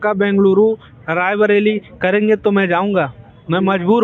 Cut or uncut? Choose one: uncut